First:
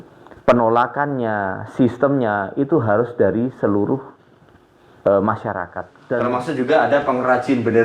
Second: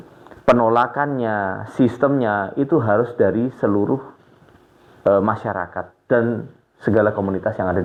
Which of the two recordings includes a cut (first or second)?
first